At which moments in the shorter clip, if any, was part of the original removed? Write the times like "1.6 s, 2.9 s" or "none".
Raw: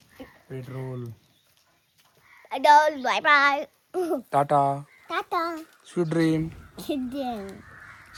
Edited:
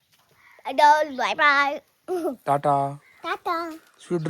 none